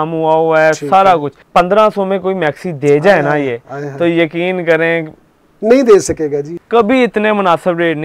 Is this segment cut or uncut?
cut